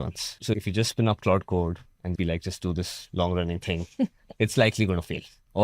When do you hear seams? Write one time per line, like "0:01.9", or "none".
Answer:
0:02.1